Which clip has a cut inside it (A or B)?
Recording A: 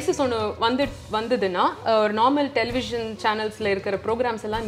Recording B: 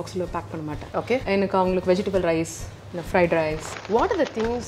B